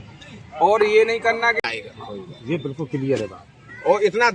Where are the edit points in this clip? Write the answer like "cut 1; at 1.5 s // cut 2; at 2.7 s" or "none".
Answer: cut 1; at 1.6 s